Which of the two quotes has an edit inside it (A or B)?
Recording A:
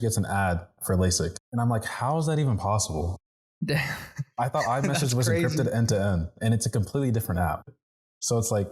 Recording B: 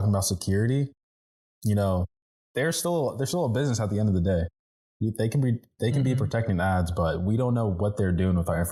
A